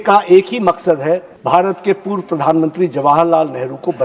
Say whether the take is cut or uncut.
cut